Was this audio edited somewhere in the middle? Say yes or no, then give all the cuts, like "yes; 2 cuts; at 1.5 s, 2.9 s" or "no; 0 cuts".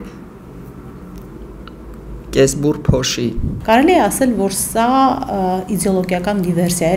yes; 1 cut; at 3.5 s